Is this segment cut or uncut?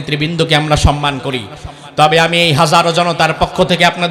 uncut